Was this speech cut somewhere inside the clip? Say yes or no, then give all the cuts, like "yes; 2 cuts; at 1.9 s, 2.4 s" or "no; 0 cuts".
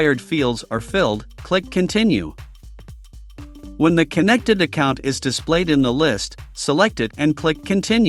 no; 0 cuts